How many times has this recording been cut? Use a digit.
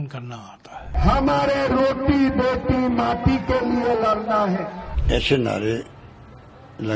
2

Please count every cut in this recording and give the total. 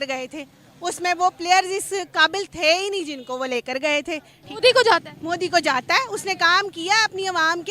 1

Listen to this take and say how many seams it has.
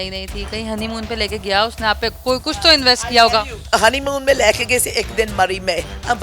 0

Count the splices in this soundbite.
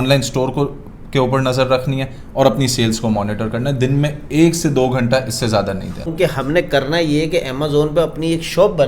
1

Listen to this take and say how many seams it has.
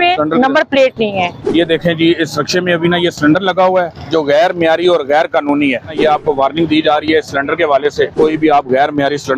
3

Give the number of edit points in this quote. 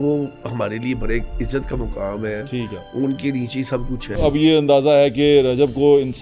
1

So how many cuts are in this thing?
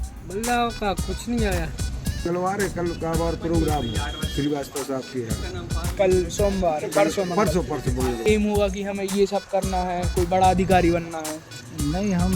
2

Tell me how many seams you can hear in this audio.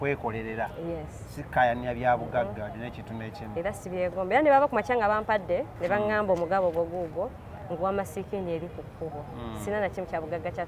0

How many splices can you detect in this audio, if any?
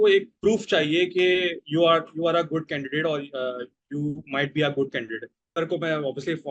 1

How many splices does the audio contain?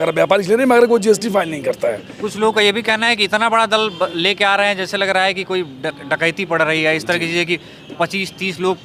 0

